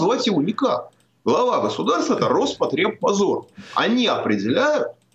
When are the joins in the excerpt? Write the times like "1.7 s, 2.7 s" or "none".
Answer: none